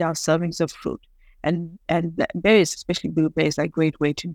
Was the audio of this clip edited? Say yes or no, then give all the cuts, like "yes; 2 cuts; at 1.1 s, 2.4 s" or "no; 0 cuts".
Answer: no; 0 cuts